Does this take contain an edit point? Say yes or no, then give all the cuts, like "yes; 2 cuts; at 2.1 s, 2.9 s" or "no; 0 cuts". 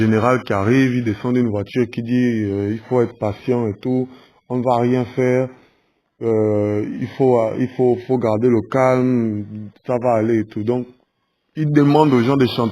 yes; 1 cut; at 3.7 s